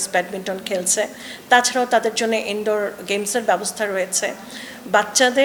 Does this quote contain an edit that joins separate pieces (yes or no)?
no